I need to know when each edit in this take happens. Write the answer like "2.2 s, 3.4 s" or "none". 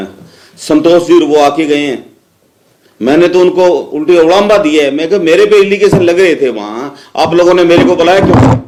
none